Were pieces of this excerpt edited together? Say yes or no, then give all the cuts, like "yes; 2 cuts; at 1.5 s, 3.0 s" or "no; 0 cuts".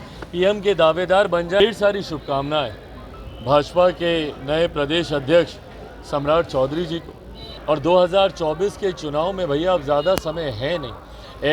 yes; 1 cut; at 1.6 s